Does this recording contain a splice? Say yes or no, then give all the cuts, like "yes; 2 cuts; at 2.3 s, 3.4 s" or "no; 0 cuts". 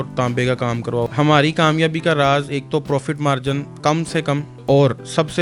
yes; 2 cuts; at 1.1 s, 4.5 s